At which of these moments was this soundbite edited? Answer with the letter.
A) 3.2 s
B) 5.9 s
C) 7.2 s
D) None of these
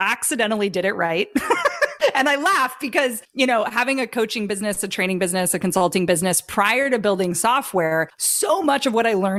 D